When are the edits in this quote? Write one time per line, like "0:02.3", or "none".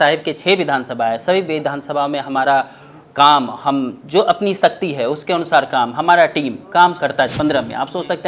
0:07.3